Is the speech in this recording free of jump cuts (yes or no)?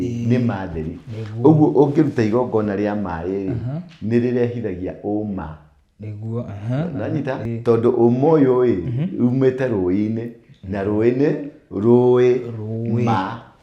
no